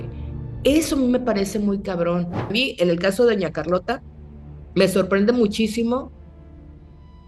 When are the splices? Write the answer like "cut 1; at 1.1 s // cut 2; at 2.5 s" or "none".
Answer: cut 1; at 2.5 s